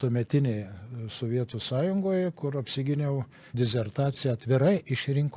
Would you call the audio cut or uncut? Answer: cut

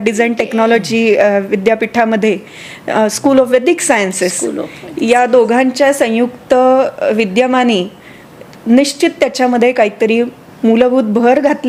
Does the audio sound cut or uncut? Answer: uncut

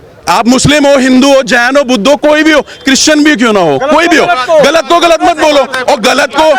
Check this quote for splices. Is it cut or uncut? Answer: uncut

